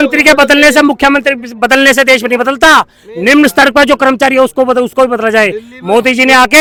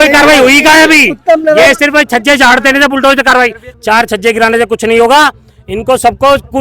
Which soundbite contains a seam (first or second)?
second